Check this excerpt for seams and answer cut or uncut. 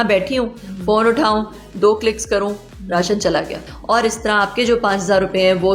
cut